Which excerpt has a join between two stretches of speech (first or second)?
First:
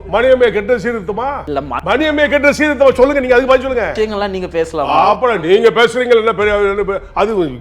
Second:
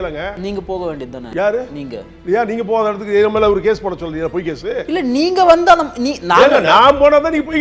first